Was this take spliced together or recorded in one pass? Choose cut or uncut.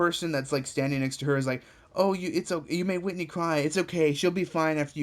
uncut